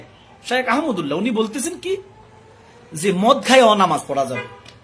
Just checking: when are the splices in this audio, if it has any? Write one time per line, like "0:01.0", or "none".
none